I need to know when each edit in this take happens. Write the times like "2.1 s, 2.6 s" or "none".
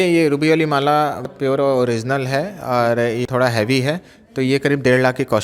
1.3 s, 3.2 s

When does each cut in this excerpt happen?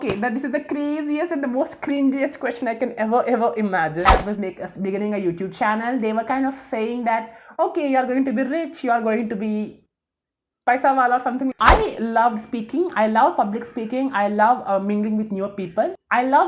4.1 s, 11.5 s

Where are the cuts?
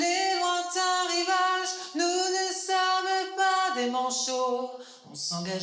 none

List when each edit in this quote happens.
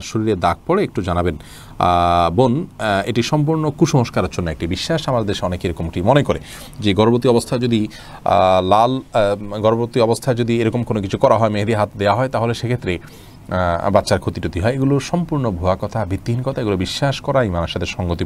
none

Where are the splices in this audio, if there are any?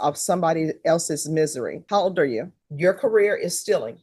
2.6 s

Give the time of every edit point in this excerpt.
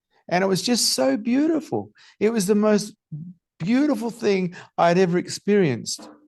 none

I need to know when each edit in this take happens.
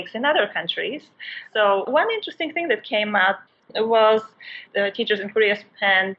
1.9 s, 3.7 s

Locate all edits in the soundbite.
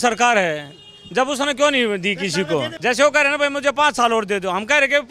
2.7 s

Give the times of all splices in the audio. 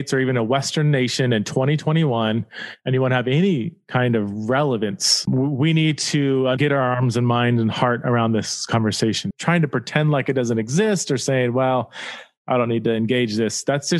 5.2 s, 6.6 s, 9.2 s

